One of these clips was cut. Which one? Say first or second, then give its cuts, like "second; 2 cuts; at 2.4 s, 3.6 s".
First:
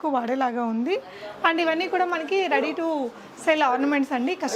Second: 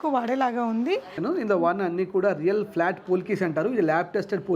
second; 1 cut; at 1.1 s